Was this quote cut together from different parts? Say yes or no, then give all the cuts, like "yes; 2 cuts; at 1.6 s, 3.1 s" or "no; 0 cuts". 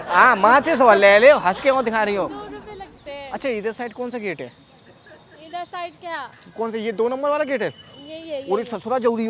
no; 0 cuts